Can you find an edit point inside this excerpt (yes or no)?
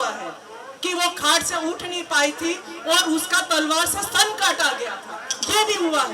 no